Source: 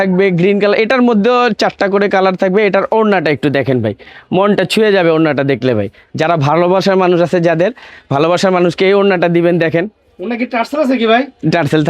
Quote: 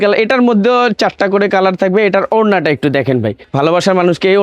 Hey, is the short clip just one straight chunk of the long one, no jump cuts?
no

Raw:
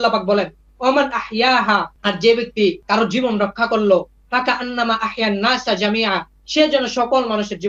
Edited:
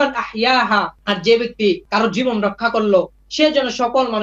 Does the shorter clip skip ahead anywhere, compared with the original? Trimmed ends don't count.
yes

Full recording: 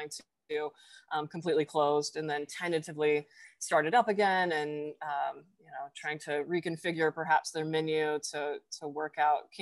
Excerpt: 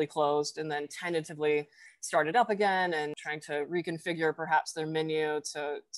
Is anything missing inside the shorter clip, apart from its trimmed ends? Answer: yes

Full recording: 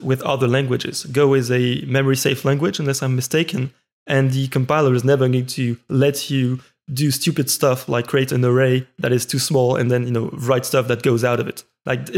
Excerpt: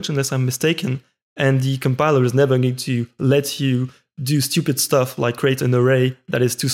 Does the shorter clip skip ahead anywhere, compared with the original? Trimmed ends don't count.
no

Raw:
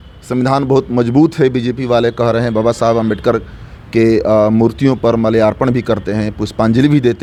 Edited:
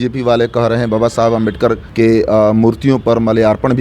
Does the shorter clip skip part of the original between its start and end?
yes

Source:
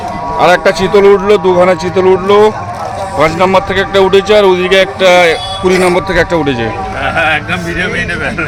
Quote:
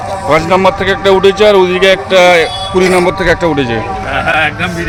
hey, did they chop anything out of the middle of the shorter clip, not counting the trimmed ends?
no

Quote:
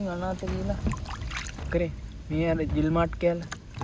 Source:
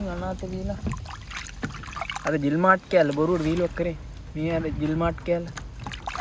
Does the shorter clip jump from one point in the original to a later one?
yes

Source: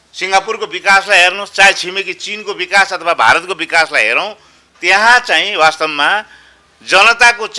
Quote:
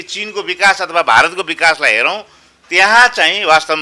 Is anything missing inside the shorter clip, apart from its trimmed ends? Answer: no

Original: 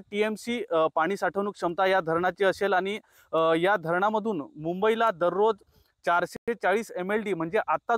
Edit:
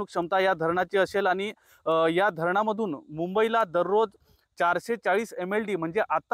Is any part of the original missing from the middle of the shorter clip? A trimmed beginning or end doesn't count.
yes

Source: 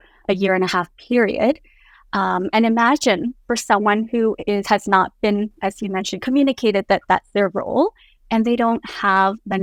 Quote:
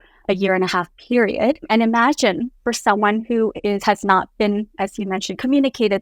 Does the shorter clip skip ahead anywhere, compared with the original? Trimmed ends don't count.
yes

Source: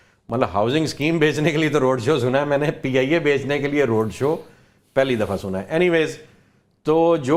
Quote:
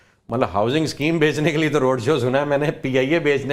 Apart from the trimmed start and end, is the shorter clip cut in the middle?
no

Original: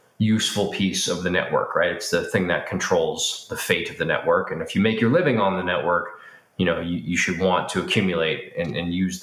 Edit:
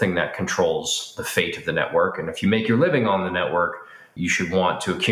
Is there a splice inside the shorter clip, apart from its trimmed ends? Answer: yes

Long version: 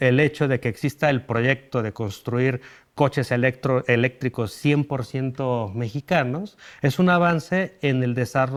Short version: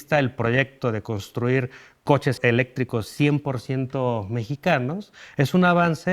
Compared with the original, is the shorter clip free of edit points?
no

